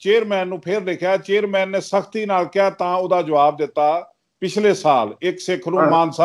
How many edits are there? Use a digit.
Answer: 0